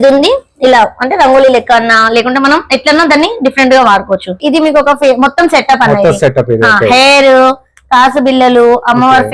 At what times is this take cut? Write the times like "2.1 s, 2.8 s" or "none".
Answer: 4.4 s